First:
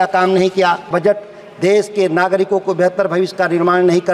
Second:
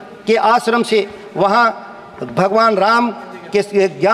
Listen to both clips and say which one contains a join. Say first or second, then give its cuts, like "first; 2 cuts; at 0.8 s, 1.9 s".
first; 1 cut; at 0.9 s